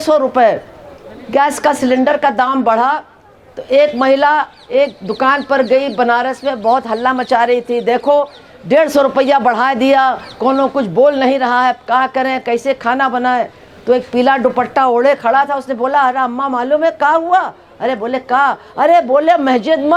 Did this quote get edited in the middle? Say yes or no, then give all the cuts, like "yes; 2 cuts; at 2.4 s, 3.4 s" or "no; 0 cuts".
no; 0 cuts